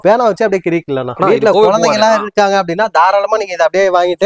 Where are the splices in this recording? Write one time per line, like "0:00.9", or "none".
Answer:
0:01.1